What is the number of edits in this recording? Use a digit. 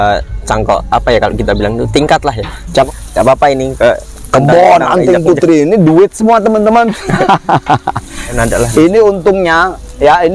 2